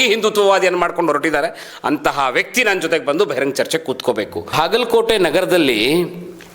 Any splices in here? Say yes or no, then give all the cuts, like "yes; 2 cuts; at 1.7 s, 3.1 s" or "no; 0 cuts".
yes; 1 cut; at 4.5 s